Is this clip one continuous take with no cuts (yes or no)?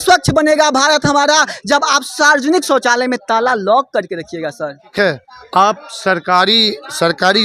no